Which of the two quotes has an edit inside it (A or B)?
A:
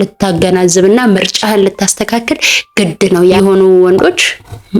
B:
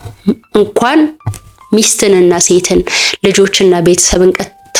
A